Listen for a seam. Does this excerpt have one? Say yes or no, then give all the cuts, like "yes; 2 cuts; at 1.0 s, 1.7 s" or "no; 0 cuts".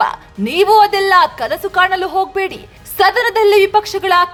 no; 0 cuts